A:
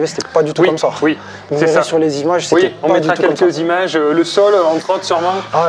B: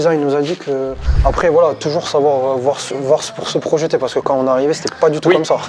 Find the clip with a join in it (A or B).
B